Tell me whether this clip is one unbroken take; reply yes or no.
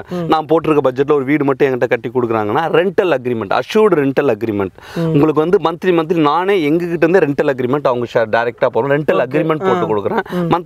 yes